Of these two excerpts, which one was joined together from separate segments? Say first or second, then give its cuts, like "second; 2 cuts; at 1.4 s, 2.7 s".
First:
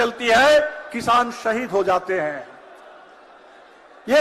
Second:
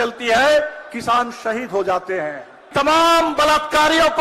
second; 1 cut; at 2.7 s